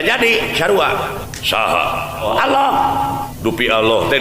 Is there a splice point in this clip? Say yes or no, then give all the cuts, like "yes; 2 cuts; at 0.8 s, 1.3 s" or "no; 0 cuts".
yes; 3 cuts; at 1.3 s, 2.3 s, 3.3 s